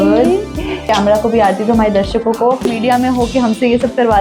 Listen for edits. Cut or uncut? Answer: cut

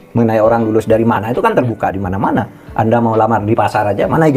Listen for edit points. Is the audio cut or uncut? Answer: uncut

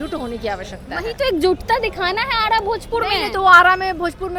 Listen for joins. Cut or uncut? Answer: uncut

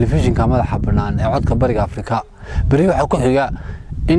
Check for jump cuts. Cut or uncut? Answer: uncut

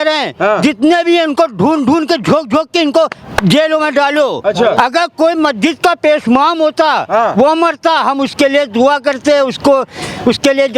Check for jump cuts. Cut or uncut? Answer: cut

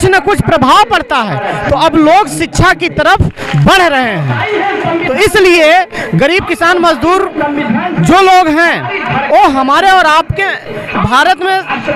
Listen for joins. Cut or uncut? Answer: uncut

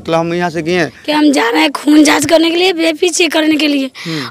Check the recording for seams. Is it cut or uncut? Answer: cut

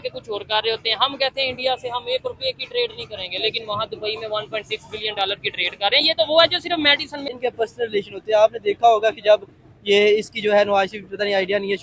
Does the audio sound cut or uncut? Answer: cut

